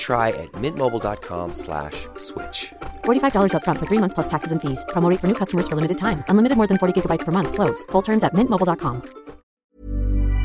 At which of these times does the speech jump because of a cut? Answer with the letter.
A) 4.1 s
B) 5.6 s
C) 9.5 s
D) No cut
C